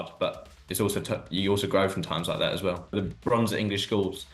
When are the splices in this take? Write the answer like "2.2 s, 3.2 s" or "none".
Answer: 2.9 s